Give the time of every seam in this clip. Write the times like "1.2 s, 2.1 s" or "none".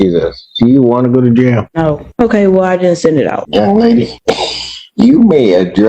1.9 s, 3.4 s, 4.1 s